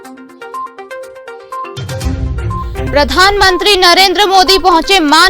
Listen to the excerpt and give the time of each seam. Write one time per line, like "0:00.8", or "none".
0:02.7